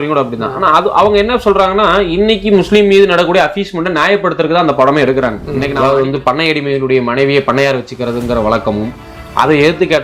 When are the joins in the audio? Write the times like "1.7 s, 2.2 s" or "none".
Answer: 5.7 s